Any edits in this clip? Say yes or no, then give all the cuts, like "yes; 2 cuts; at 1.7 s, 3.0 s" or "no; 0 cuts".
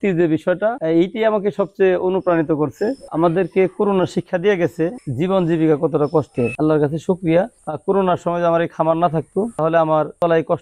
yes; 4 cuts; at 3.0 s, 5.0 s, 6.5 s, 7.6 s